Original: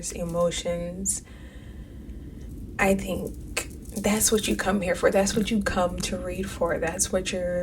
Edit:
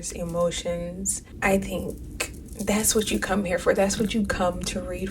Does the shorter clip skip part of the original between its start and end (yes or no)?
yes